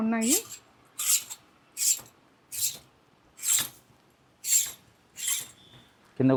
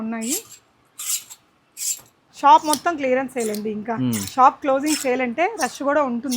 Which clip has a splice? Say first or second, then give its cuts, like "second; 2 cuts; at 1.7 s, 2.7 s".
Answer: second; 1 cut; at 2.3 s